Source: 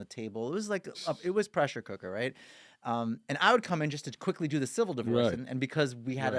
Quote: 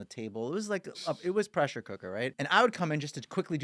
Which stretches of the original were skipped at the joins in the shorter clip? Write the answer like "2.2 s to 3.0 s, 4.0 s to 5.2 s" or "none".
2.4 s to 3.3 s